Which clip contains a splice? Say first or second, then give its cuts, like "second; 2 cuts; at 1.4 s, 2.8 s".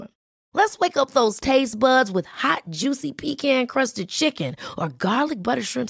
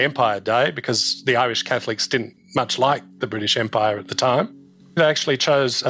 second; 1 cut; at 4.9 s